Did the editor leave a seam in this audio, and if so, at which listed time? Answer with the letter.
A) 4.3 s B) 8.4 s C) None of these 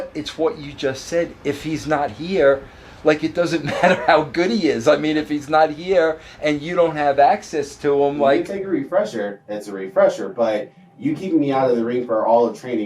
B